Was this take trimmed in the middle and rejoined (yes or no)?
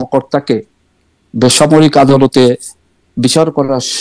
no